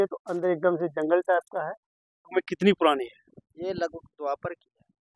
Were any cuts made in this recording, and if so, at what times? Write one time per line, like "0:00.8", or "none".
0:02.2